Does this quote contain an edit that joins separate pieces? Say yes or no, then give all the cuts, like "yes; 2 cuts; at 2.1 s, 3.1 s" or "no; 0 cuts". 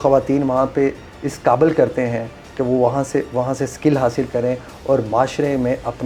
no; 0 cuts